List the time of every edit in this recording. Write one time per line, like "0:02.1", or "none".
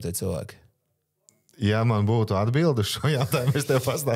none